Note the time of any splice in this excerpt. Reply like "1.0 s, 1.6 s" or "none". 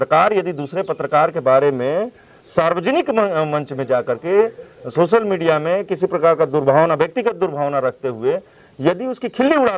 none